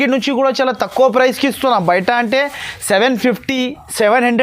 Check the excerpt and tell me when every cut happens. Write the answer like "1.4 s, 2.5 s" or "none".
none

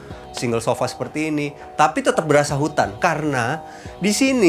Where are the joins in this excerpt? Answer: 2.9 s

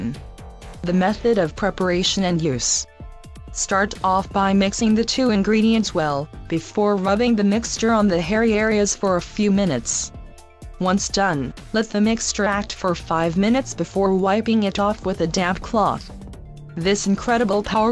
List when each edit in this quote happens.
2.4 s

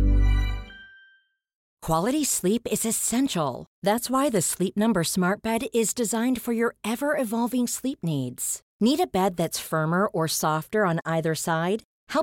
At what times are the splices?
1.6 s

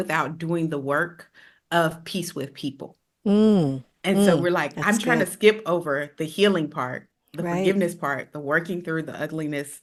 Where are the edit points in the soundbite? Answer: none

